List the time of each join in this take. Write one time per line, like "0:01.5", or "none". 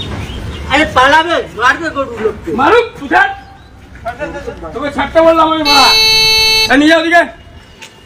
none